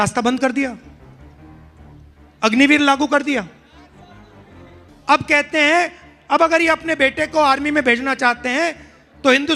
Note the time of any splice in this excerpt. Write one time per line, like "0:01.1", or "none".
0:00.9
0:02.3